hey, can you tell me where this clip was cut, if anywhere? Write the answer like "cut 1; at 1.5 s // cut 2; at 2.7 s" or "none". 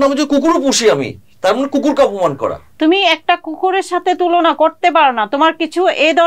cut 1; at 2.6 s